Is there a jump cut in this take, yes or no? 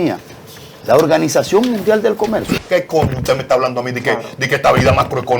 yes